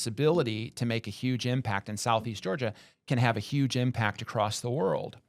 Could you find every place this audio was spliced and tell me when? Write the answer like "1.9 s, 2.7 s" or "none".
none